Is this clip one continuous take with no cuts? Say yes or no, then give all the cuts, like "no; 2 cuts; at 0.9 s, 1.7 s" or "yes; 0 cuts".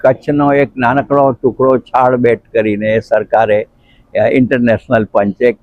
yes; 0 cuts